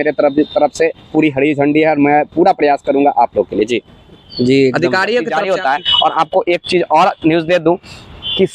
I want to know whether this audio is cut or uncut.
cut